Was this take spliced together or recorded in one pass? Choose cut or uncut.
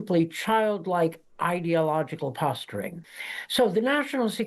cut